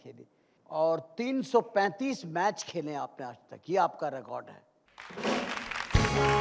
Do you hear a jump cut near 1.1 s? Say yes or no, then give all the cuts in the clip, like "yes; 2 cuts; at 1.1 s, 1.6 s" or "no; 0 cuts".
no; 0 cuts